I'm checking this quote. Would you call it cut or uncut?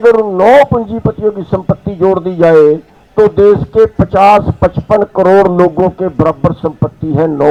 uncut